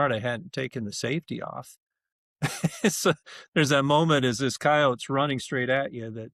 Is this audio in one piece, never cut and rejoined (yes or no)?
yes